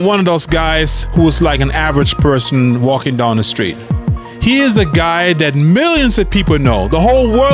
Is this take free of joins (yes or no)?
yes